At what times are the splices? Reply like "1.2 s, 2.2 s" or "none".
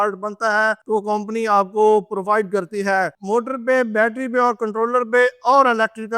3.1 s